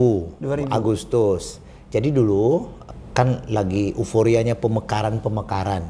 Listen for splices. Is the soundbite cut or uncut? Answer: cut